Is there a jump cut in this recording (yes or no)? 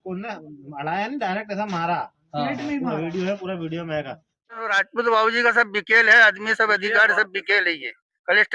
yes